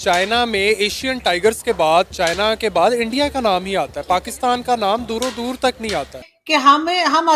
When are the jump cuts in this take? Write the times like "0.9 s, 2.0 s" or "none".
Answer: 6.3 s